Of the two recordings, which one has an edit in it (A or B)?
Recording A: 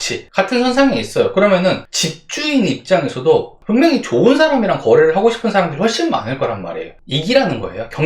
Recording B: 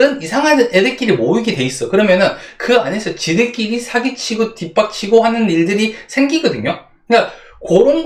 A